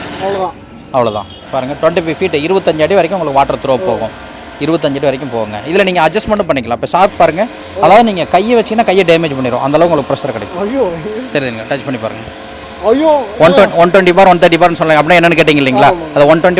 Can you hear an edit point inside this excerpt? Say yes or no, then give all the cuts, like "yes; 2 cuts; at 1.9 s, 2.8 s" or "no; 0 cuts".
no; 0 cuts